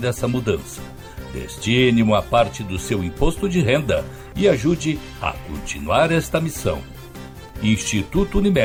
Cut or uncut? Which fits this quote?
uncut